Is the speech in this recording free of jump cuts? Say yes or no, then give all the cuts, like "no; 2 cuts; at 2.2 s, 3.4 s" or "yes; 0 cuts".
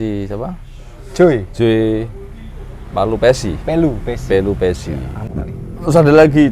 no; 1 cut; at 5.3 s